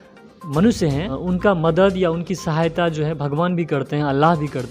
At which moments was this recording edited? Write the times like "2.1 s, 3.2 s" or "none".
1.2 s